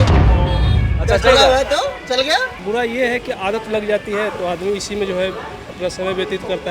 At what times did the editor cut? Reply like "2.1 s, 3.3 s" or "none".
2.6 s